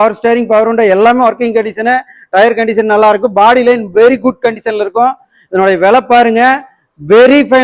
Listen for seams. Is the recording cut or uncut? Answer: uncut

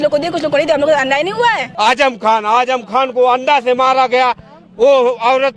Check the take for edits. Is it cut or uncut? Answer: cut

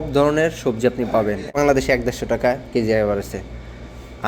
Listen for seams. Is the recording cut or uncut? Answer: cut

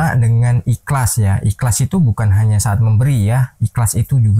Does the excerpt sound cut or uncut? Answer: uncut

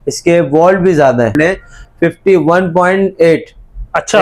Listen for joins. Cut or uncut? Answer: cut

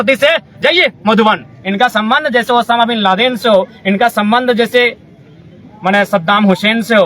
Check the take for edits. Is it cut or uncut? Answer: cut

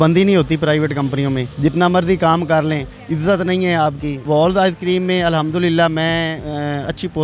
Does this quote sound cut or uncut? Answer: cut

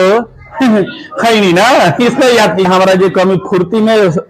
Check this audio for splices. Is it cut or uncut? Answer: cut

